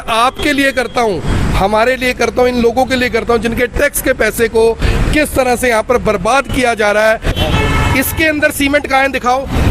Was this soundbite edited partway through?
yes; 1 cut; at 7.4 s

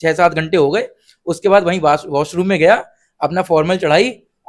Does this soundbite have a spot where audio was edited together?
no; 0 cuts

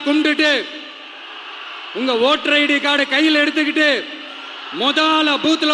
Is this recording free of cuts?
yes; 0 cuts

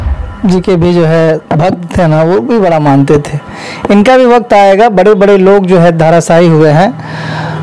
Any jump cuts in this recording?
no; 0 cuts

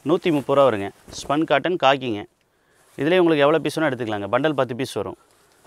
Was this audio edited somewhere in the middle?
no; 0 cuts

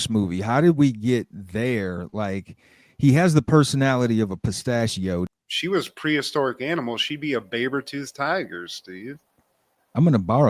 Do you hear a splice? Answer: yes; 1 cut; at 5.3 s

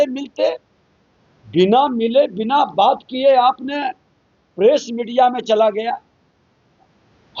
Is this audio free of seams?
yes; 0 cuts

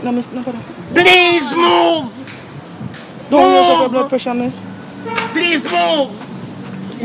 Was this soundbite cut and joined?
no; 0 cuts

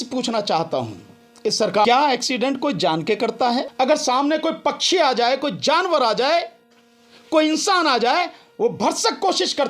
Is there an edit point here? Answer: yes; 2 cuts; at 1.9 s, 3.7 s

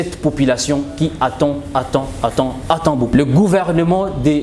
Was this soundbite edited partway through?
yes; 1 cut; at 3.1 s

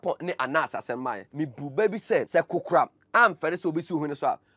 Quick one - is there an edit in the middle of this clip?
yes; 2 cuts; at 1.2 s, 2.3 s

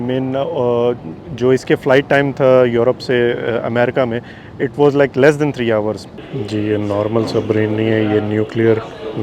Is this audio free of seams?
no; 1 cut; at 6.1 s

